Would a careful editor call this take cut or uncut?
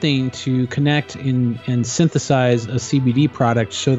uncut